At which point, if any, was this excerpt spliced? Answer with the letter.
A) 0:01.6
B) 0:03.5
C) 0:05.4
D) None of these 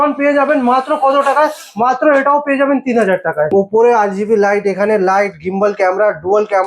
B